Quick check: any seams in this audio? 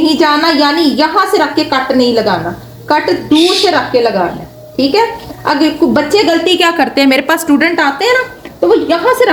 no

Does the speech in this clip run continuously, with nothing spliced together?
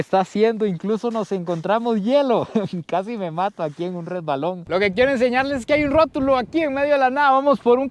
no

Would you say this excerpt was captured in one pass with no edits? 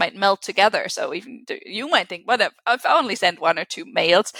yes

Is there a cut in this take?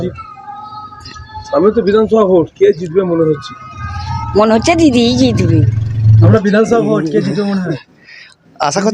yes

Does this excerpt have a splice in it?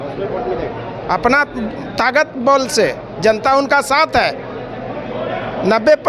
no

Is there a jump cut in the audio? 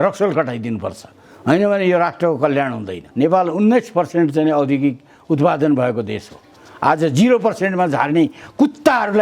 yes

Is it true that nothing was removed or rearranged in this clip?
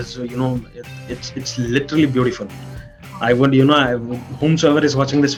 yes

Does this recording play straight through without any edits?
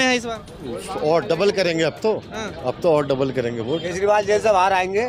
no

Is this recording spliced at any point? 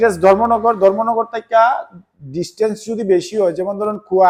no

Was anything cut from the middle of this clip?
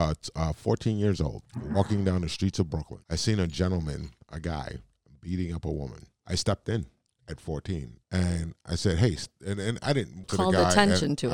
yes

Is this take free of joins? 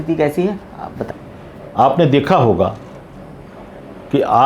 no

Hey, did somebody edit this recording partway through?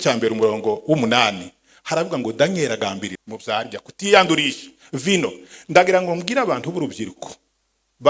yes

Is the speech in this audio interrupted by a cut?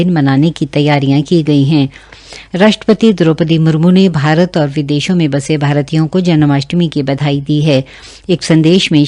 no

